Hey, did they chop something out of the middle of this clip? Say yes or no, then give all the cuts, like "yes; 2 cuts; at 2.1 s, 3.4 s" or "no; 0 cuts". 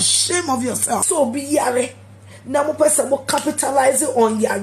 yes; 1 cut; at 1.0 s